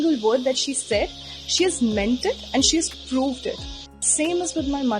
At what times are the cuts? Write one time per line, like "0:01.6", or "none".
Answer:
0:04.0